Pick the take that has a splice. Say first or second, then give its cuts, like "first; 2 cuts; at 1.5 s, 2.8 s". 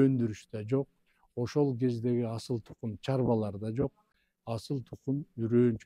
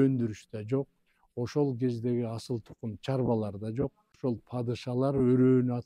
second; 1 cut; at 4.1 s